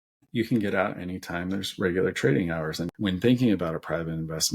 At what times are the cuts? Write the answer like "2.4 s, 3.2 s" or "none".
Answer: 2.9 s